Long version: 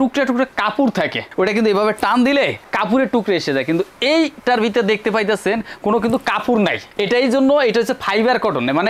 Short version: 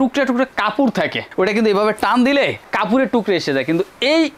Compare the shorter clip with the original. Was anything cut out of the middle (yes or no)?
no